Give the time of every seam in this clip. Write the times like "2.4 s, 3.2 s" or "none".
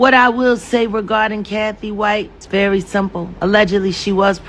2.4 s, 3.3 s

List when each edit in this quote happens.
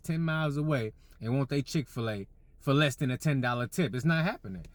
none

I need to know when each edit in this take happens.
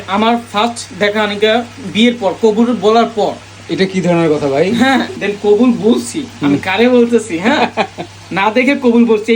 5.2 s

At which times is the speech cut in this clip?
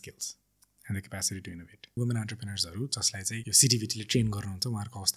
2.0 s, 3.5 s

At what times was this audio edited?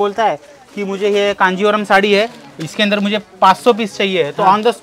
none

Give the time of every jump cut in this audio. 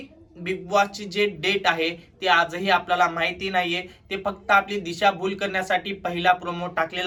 none

